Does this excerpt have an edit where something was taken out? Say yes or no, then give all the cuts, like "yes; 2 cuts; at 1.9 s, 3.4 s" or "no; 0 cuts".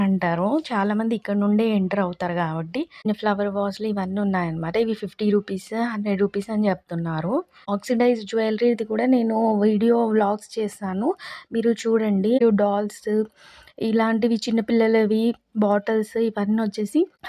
yes; 3 cuts; at 3.1 s, 7.6 s, 12.4 s